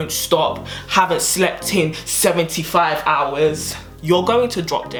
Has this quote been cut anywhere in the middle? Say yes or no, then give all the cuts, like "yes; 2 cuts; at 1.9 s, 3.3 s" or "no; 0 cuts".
no; 0 cuts